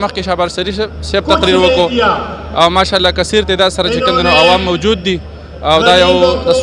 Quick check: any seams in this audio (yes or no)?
no